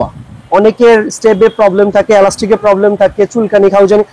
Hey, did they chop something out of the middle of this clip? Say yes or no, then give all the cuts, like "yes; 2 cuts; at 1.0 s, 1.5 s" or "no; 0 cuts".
no; 0 cuts